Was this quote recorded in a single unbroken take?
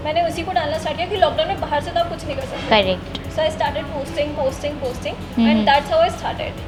yes; 0 cuts

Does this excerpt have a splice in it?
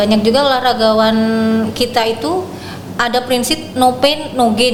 no; 0 cuts

